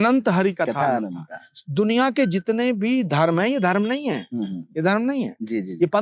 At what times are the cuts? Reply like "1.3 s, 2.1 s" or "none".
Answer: none